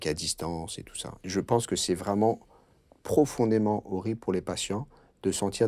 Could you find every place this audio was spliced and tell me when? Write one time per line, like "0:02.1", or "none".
0:01.2

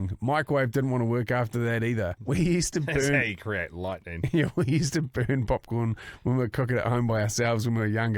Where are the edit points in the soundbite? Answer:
0:02.2

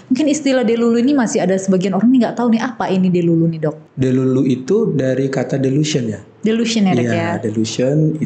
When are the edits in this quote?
0:03.8

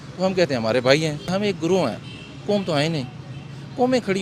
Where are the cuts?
0:01.3

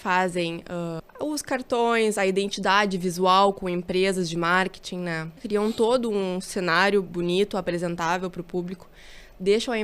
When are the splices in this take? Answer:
0:01.1
0:05.3

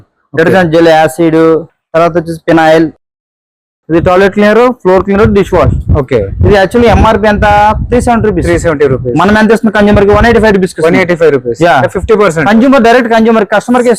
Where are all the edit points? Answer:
0:03.7

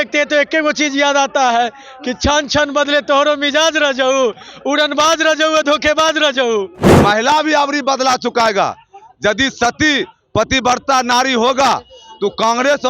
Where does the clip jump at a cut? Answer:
0:06.8

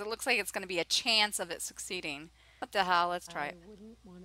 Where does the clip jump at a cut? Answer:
0:02.4

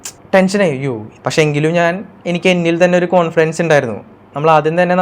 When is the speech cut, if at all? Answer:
0:01.1

